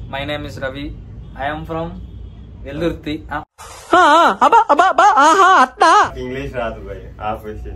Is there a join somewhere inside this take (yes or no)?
yes